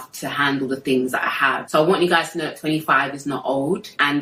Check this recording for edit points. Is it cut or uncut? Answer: uncut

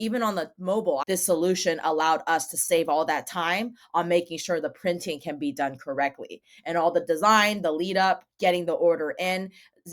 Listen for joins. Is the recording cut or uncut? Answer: cut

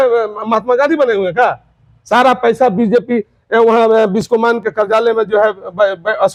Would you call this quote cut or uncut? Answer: uncut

